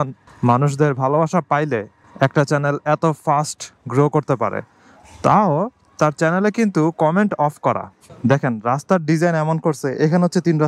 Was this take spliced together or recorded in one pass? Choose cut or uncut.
cut